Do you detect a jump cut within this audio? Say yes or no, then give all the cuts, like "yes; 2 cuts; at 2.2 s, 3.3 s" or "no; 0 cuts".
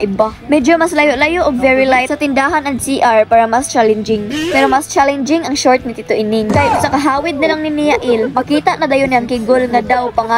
no; 0 cuts